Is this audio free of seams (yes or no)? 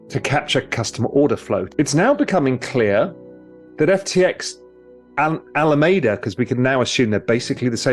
no